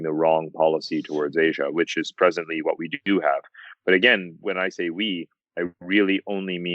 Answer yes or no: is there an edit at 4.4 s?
yes